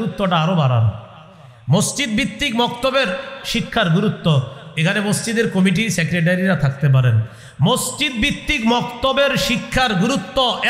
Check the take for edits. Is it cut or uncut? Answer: uncut